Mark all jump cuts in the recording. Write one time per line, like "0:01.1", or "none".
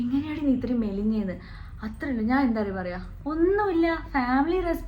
none